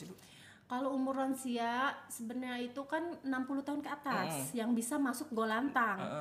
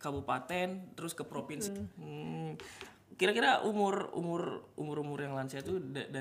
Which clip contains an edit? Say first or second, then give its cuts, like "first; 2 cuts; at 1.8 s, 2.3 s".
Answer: second; 1 cut; at 1.6 s